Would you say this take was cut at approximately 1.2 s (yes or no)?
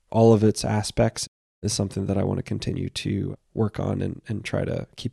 yes